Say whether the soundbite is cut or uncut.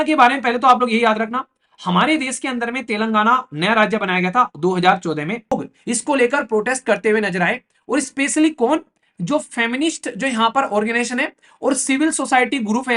cut